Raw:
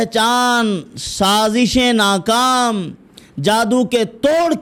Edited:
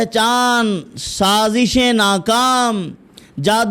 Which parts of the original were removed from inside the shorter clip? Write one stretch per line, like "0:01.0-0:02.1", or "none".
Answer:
none